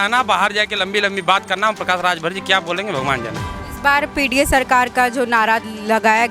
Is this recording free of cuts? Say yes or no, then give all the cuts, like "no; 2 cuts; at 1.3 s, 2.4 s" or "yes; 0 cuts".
yes; 0 cuts